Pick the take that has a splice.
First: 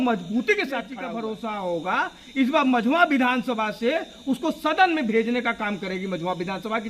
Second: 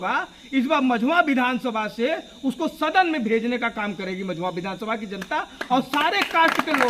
first; 1 cut; at 0.9 s

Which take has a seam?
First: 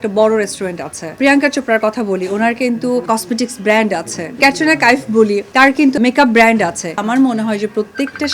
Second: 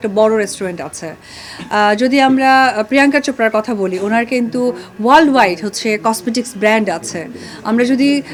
first; 5 cuts; at 1.2 s, 3.0 s, 4.4 s, 5.7 s, 7.0 s

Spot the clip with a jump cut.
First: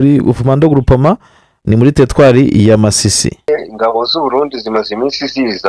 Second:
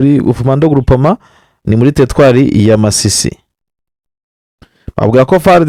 first; 1 cut; at 3.5 s

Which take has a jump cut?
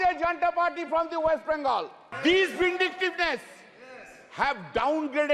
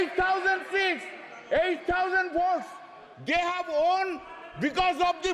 first; 1 cut; at 2.0 s

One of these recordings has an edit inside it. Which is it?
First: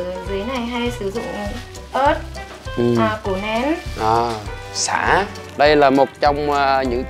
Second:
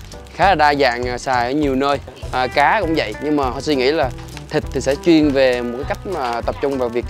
first; 1 cut; at 5.4 s

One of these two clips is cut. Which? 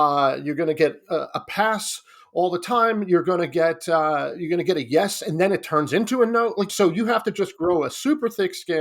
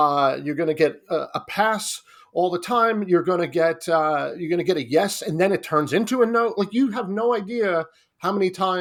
first; 1 cut; at 6.7 s

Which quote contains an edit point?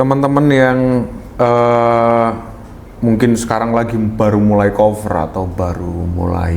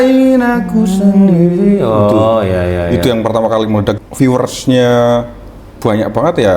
second; 1 cut; at 4.0 s

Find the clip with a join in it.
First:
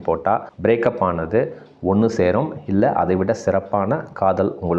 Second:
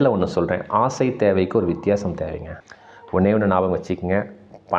second; 1 cut; at 2.6 s

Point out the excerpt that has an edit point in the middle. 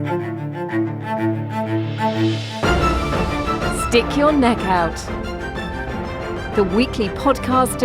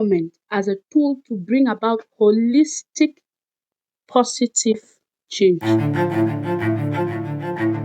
second; 1 cut; at 5.6 s

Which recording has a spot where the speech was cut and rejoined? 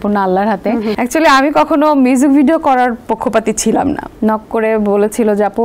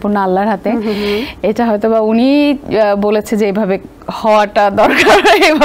first; 2 cuts; at 0.9 s, 4.1 s

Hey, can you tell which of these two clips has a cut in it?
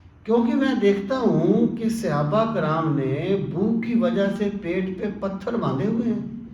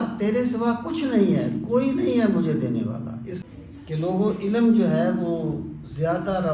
second; 1 cut; at 3.4 s

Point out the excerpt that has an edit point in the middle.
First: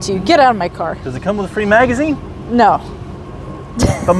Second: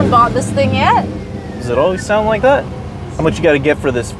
second; 1 cut; at 3.1 s

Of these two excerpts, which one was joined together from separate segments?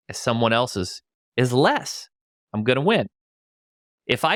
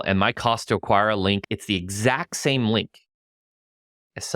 second; 1 cut; at 1.4 s

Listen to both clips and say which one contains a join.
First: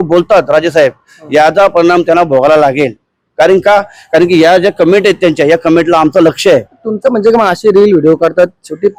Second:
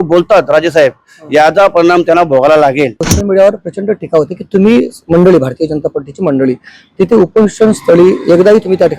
second; 1 cut; at 3.1 s

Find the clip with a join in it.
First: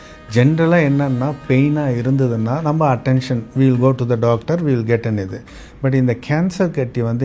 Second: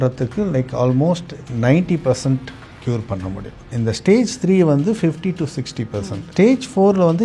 second; 2 cuts; at 3.5 s, 6.2 s

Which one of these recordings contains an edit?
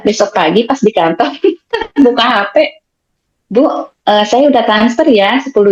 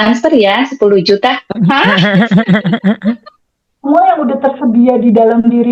second; 1 cut; at 3.3 s

